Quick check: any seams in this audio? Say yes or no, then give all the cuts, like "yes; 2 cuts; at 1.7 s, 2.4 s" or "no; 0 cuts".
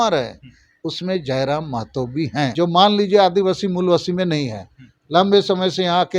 yes; 1 cut; at 2.5 s